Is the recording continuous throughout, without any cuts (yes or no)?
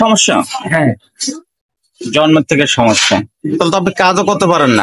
no